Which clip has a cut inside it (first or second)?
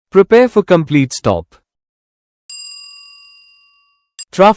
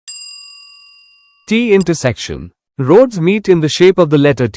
second